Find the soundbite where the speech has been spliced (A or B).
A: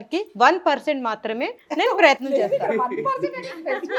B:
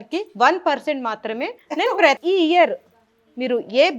B